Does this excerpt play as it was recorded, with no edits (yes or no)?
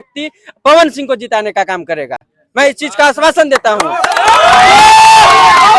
yes